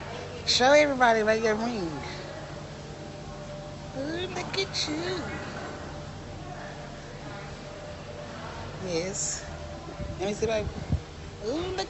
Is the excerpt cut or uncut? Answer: uncut